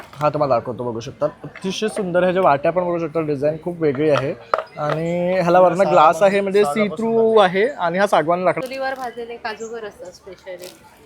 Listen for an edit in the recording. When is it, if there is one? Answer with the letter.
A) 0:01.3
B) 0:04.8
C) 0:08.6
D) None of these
C